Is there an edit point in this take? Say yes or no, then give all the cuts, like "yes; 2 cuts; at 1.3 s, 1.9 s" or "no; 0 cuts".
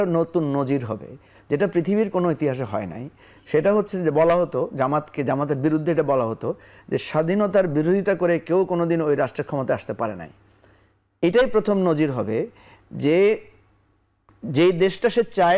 no; 0 cuts